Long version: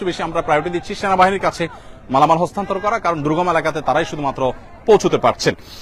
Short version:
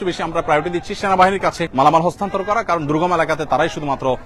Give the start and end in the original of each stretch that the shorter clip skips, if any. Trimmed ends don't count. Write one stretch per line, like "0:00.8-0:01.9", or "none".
0:01.6-0:02.0